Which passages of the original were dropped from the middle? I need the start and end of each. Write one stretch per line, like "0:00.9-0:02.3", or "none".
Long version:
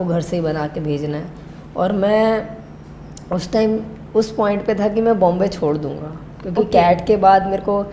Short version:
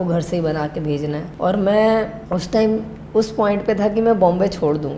0:01.3-0:01.6
0:02.5-0:03.2